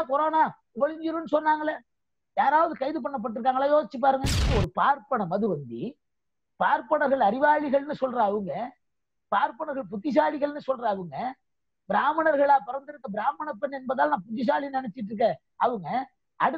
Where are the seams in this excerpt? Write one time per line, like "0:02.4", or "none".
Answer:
0:04.5